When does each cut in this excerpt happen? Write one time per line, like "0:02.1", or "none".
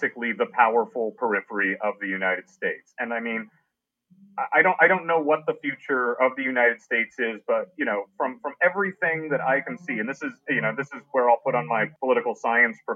0:11.9